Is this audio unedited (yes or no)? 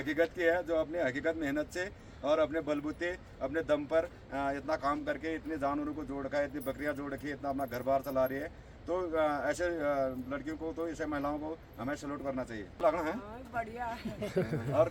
yes